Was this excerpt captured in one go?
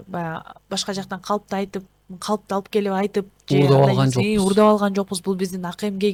yes; 0 cuts

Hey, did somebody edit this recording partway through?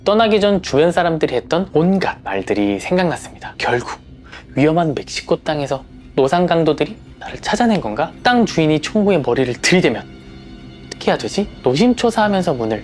yes; 1 cut; at 1.9 s

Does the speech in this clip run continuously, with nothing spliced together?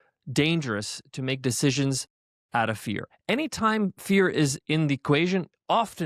yes; 0 cuts

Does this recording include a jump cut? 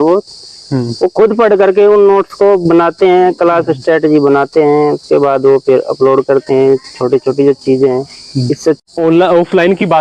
no; 0 cuts

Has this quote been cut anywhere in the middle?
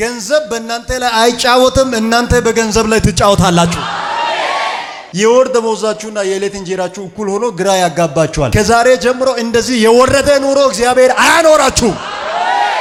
no; 0 cuts

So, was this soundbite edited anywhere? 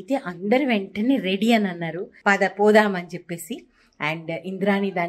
yes; 1 cut; at 2.0 s

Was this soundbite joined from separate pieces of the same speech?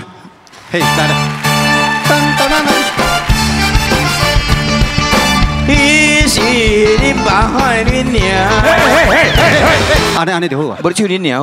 yes; 1 cut; at 10.1 s

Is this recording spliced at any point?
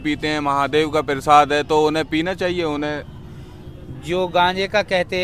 no; 0 cuts

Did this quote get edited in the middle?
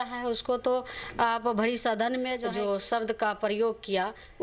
yes; 1 cut; at 2.4 s

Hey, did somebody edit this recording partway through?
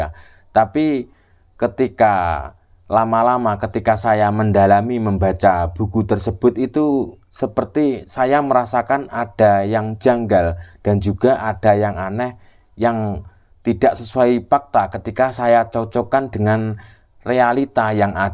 no; 0 cuts

